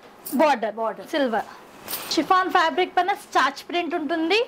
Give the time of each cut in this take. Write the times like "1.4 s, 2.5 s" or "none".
2.0 s